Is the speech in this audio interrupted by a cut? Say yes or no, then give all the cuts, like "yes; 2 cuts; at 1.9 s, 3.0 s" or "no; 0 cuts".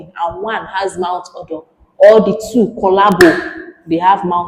no; 0 cuts